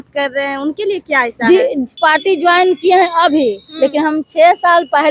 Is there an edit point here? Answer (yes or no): yes